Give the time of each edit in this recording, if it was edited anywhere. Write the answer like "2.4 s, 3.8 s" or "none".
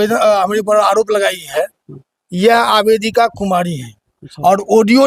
none